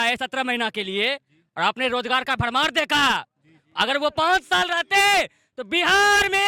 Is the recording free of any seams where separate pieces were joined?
yes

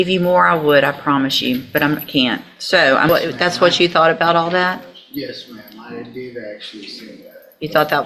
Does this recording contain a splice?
yes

